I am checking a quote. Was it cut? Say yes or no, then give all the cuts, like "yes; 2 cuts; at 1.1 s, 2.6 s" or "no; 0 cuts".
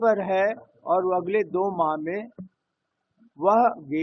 no; 0 cuts